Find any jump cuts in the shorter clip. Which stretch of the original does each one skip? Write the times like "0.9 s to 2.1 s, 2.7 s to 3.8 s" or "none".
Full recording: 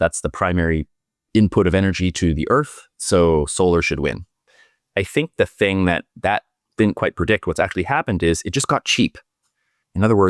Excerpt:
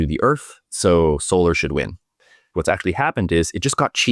4.8 s to 7.4 s